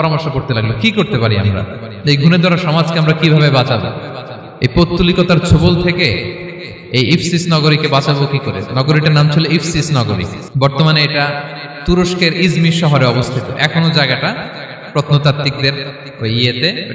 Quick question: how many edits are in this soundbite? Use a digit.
1